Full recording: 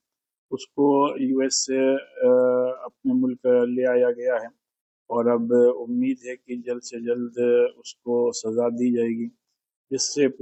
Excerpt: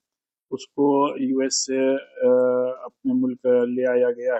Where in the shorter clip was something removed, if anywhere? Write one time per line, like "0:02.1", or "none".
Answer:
none